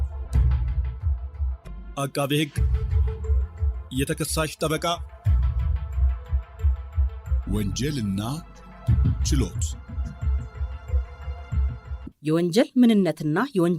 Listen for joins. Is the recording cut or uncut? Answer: uncut